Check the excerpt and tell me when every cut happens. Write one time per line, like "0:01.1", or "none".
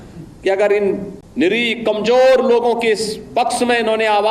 0:01.2